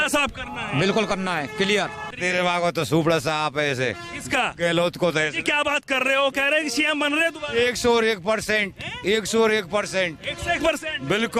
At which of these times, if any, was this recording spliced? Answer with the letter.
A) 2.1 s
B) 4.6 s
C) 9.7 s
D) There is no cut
A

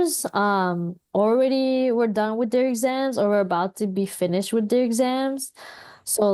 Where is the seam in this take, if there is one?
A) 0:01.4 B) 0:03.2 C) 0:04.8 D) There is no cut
D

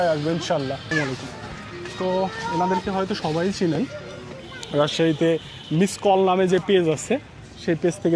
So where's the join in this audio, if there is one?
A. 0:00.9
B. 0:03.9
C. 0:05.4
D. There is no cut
A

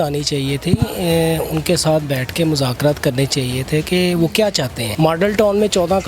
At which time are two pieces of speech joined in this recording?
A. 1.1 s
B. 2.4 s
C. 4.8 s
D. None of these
C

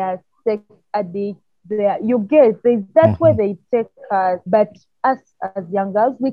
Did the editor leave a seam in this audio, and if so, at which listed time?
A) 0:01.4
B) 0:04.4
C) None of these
B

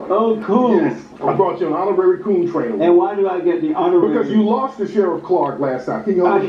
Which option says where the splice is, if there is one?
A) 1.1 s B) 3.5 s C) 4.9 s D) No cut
A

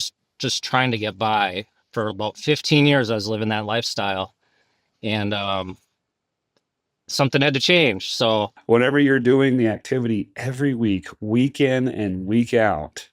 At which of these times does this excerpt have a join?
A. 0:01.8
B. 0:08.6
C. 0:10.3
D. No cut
B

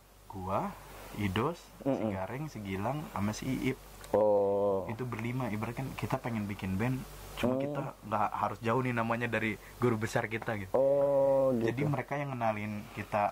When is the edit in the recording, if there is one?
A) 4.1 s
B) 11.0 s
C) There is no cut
C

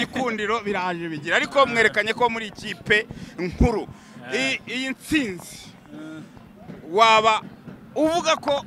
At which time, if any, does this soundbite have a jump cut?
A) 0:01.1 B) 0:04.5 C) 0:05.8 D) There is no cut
D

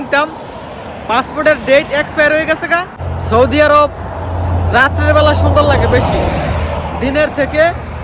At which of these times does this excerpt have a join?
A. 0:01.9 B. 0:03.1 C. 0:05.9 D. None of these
B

